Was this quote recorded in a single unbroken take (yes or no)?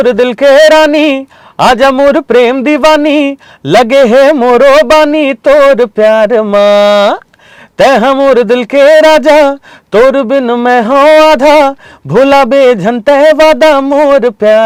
yes